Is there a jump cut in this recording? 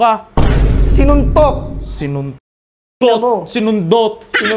no; 0 cuts

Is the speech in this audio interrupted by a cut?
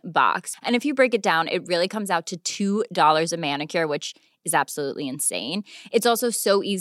no; 0 cuts

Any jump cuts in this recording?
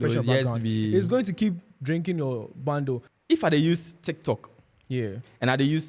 yes; 1 cut; at 3.1 s

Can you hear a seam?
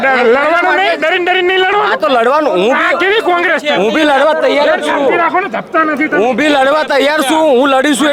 no; 0 cuts

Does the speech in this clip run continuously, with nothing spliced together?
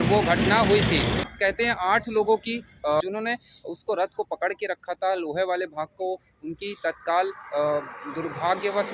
no; 2 cuts; at 1.2 s, 3.0 s

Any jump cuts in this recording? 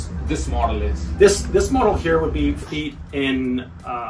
yes; 1 cut; at 2.6 s

